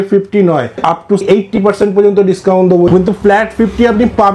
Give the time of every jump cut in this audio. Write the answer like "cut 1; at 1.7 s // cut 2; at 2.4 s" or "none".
cut 1; at 1.2 s // cut 2; at 2.9 s

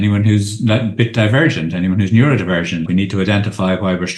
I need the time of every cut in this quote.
cut 1; at 2.8 s

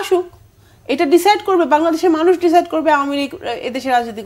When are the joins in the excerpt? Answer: none

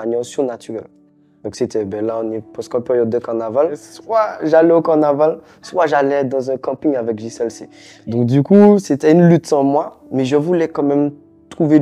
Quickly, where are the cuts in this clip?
cut 1; at 3.9 s

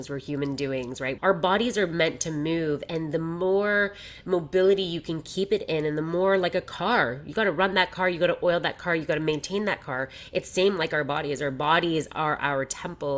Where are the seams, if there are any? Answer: cut 1; at 1.1 s

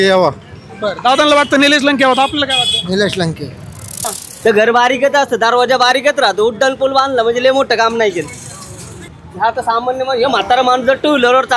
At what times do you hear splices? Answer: cut 1; at 4.0 s // cut 2; at 9.2 s

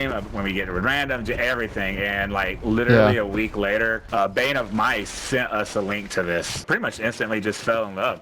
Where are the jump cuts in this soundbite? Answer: cut 1; at 4.0 s // cut 2; at 6.6 s

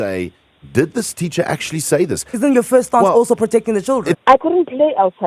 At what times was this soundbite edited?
cut 1; at 2.3 s // cut 2; at 4.2 s

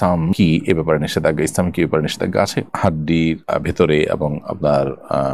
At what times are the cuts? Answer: none

